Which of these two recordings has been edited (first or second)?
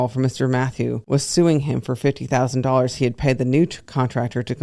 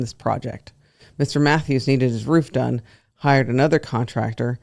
first